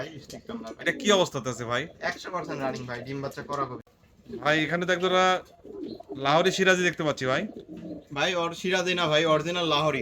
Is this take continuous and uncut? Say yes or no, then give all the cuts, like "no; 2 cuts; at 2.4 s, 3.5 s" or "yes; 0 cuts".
no; 1 cut; at 3.8 s